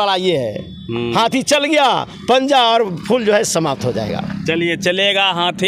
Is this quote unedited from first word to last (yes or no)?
yes